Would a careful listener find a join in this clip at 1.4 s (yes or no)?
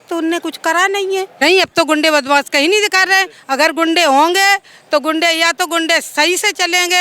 yes